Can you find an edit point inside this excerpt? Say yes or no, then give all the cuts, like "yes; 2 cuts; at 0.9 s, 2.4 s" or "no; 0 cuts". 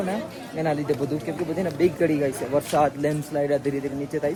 no; 0 cuts